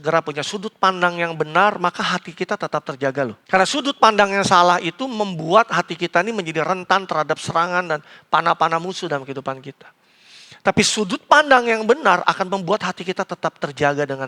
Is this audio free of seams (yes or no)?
no